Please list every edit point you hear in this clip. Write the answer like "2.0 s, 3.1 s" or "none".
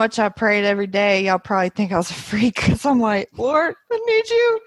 none